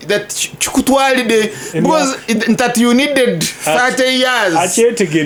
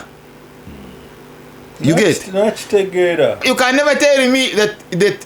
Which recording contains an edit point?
second; 1 cut; at 3.4 s

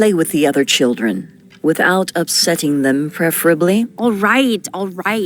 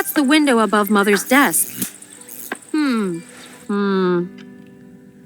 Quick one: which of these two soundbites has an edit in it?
second; 1 cut; at 3.2 s

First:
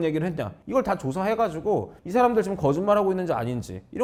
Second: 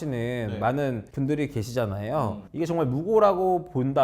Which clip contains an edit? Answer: second; 1 cut; at 2.4 s

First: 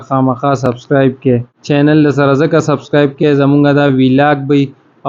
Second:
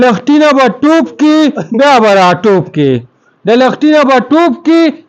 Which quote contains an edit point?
first; 1 cut; at 1.5 s

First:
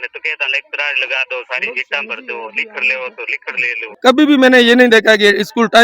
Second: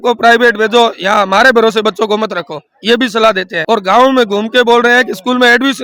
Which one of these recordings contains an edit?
first; 1 cut; at 4.0 s

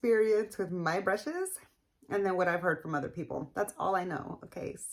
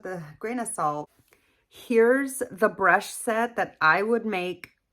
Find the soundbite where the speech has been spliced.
second; 1 cut; at 1.2 s

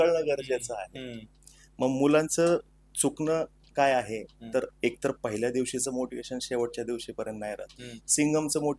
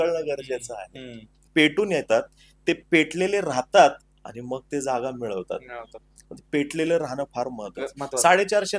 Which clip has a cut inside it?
second; 1 cut; at 1.4 s

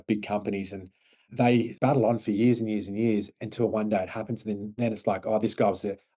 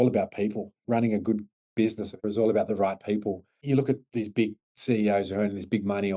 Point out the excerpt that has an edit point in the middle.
second; 4 cuts; at 0.8 s, 2.2 s, 3.5 s, 4.7 s

